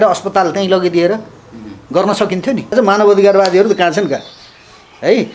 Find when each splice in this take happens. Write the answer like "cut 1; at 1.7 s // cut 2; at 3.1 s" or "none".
cut 1; at 2.7 s